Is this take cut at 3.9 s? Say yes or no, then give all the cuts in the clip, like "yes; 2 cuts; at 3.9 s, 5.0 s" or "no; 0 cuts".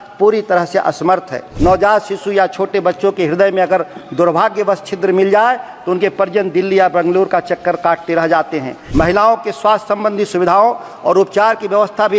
no; 2 cuts; at 1.4 s, 8.8 s